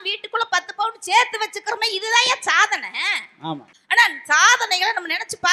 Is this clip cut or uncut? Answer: uncut